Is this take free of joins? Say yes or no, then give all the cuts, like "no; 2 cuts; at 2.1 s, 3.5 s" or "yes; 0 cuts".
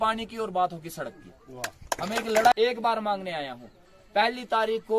no; 1 cut; at 2.5 s